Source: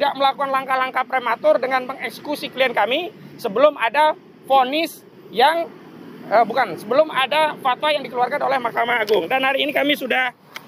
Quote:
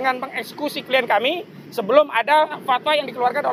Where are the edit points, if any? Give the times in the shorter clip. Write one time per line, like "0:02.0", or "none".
0:02.6